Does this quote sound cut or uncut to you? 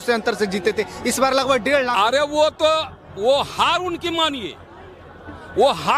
uncut